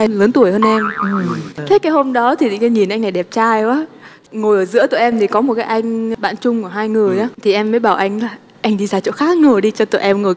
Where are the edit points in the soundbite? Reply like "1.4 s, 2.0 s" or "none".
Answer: 1.5 s